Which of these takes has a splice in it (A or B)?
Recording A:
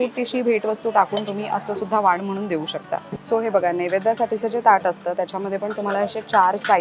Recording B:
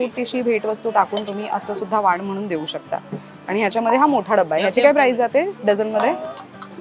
A